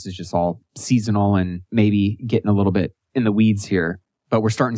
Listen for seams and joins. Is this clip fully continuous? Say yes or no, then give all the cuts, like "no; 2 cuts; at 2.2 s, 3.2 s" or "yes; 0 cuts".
no; 2 cuts; at 1.6 s, 3.0 s